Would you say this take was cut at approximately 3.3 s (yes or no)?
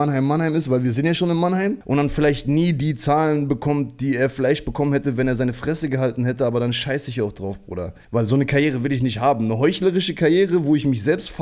no